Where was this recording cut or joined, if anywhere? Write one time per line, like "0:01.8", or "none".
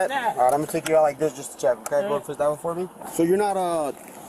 0:03.0